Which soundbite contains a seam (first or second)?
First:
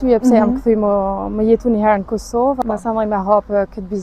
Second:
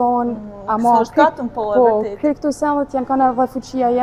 first